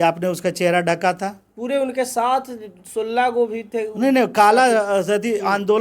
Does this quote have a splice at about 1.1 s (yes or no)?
no